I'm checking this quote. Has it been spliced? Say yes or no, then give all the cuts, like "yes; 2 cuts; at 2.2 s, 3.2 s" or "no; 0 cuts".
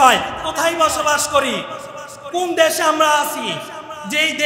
no; 0 cuts